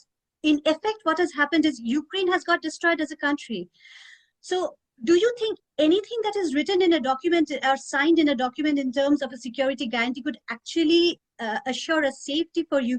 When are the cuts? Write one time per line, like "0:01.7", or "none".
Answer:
none

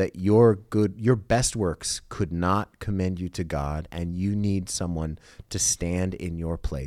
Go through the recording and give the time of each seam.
none

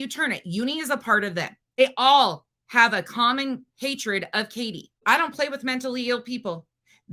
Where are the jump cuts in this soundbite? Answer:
0:01.8
0:05.0

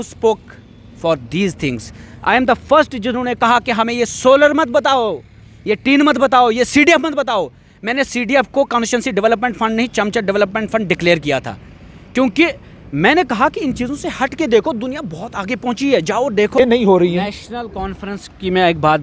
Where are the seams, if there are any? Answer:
0:16.6

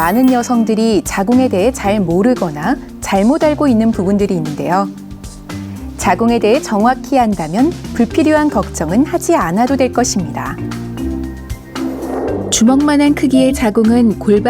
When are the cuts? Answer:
0:08.9

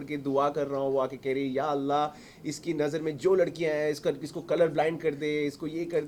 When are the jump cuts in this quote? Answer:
none

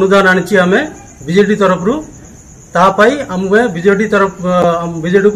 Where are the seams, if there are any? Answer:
none

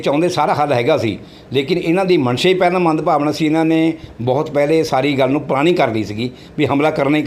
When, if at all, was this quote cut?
none

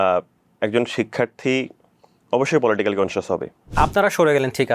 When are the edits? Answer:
0:03.6

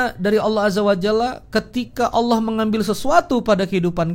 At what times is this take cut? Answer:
none

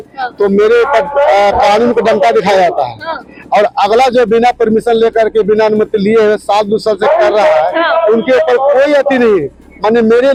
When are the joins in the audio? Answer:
none

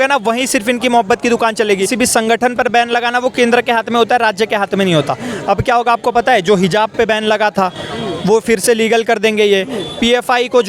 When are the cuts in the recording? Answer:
0:01.9

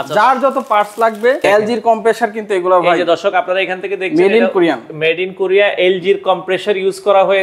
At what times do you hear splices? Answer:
0:01.4

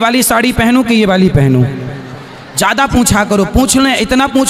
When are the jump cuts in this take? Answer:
none

